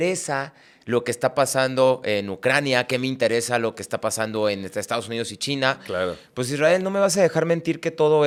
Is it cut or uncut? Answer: uncut